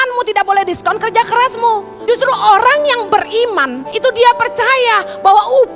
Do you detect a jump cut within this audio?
yes; 2 cuts; at 1.9 s, 3.8 s

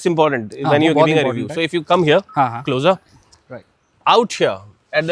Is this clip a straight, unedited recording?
yes; 0 cuts

